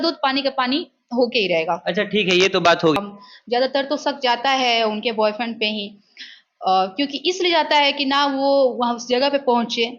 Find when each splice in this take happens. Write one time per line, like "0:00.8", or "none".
0:03.0